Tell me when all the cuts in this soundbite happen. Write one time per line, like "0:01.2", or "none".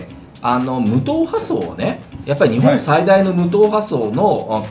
none